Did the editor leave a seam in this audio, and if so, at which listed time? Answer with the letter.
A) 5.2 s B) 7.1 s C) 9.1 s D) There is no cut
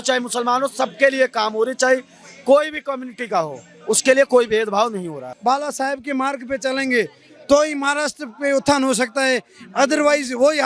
A